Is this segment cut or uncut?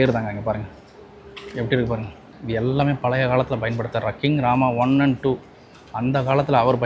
uncut